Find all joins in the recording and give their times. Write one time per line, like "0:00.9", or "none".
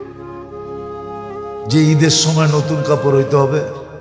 none